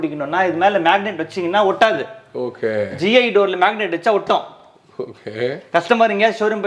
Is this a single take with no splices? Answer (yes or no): yes